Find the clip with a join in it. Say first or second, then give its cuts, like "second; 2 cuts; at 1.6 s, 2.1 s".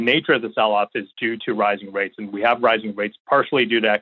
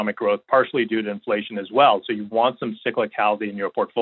first; 2 cuts; at 1.1 s, 3.2 s